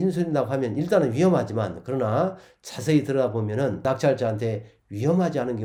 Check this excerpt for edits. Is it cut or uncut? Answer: uncut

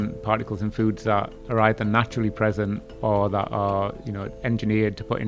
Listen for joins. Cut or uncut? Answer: uncut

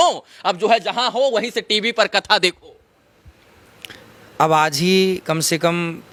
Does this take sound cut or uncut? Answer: uncut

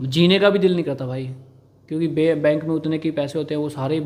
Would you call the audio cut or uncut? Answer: uncut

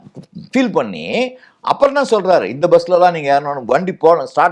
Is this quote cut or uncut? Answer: uncut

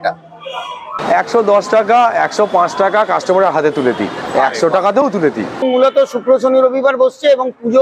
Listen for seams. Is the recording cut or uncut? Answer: cut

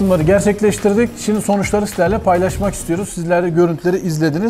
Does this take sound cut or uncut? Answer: uncut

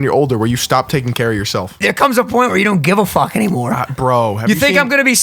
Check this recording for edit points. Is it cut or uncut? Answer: cut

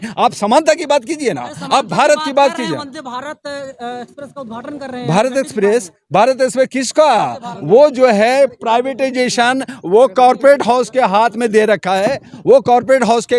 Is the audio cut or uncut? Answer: uncut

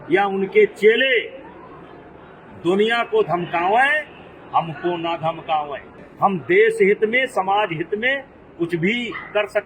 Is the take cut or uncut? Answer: uncut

